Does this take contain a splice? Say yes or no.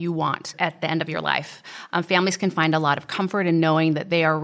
no